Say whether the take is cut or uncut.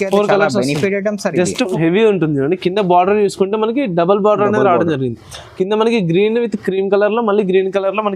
cut